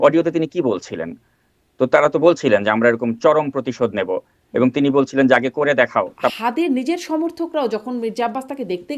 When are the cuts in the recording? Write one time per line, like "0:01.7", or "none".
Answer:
0:06.3